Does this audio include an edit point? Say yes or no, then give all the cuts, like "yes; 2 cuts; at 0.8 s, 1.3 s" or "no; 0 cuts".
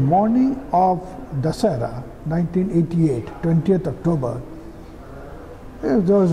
no; 0 cuts